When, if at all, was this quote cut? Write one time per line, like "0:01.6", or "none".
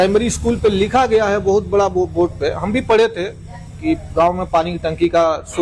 none